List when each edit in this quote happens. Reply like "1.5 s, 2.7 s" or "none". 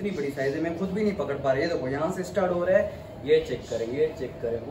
none